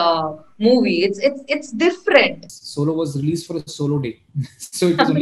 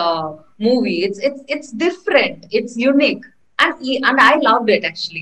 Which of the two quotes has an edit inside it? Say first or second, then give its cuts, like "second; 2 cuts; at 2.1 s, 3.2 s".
first; 1 cut; at 2.4 s